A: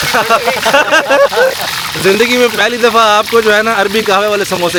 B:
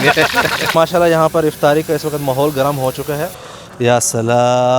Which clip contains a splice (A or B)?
B